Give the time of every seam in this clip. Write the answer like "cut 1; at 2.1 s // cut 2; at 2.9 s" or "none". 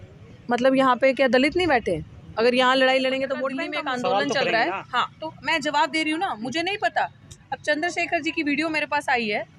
cut 1; at 3.6 s